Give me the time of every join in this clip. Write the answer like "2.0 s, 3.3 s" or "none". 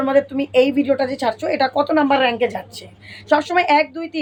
none